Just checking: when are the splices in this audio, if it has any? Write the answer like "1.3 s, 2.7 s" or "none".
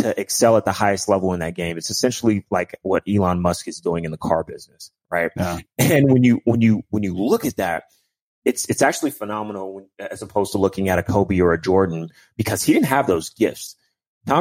none